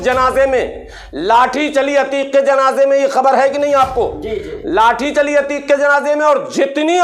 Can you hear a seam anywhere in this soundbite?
no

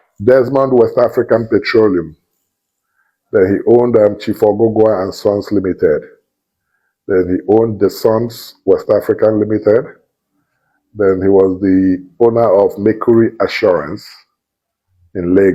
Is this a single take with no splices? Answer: yes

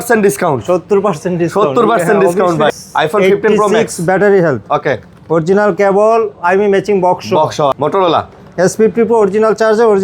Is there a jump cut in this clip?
yes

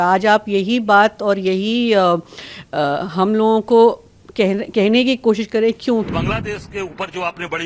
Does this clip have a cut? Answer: yes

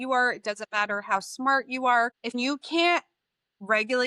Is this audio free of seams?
no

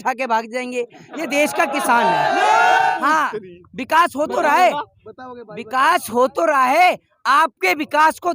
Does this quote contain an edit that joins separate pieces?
yes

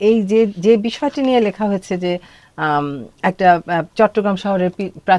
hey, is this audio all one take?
yes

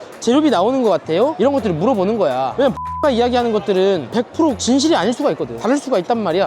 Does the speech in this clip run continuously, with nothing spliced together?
no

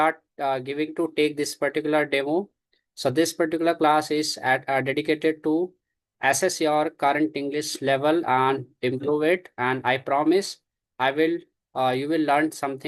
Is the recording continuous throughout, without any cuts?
yes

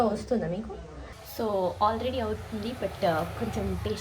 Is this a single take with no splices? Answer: no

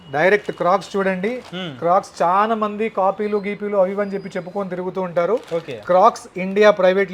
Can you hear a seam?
no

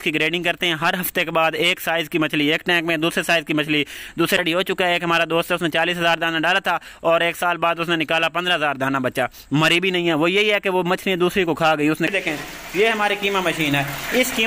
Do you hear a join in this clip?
yes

